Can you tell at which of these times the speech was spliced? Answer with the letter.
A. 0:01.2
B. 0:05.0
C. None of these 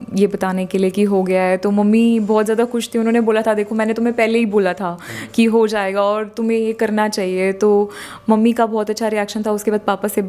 C